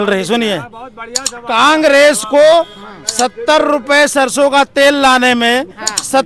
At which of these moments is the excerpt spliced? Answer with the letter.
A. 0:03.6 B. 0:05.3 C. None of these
C